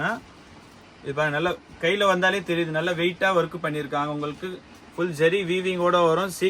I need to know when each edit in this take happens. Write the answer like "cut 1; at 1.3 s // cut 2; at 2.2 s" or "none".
none